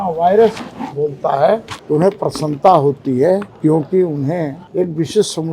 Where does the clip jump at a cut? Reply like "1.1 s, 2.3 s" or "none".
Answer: 1.8 s, 4.6 s